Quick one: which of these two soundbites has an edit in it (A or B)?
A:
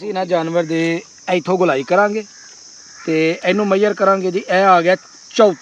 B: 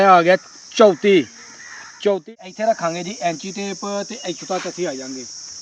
B